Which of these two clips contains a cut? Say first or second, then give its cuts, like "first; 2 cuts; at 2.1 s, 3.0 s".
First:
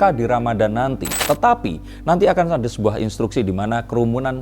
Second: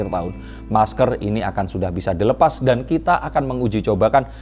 first; 1 cut; at 1.1 s